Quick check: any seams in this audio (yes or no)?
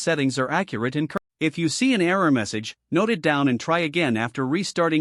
yes